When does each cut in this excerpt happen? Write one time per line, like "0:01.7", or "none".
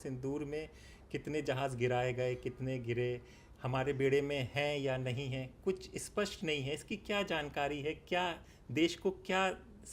none

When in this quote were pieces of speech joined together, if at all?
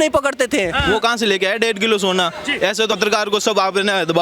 0:00.8
0:03.0

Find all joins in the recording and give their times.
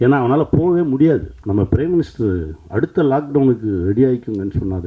0:01.3

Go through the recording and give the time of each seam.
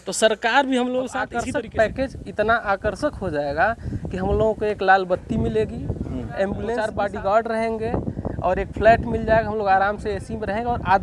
0:01.4
0:06.8

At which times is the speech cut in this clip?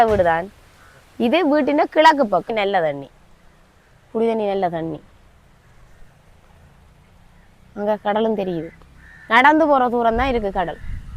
0:02.5

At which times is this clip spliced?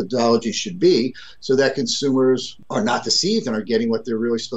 0:02.6

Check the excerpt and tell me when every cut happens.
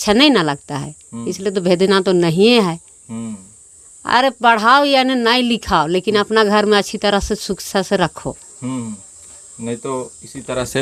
none

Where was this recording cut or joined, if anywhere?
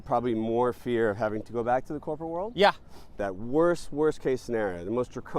0:03.3

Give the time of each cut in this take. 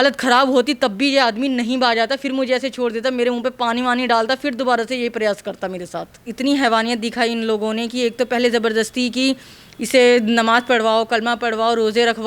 0:06.2

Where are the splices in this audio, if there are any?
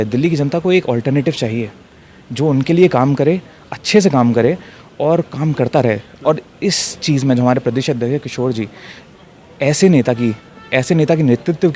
none

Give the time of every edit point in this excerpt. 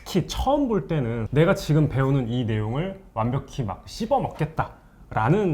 0:01.2

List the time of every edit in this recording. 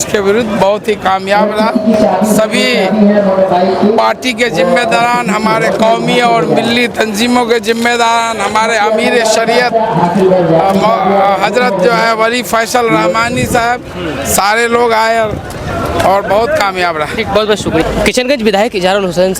none

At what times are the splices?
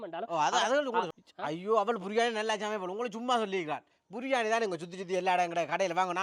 0:01.1

